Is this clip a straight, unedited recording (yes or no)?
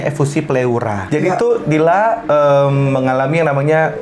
no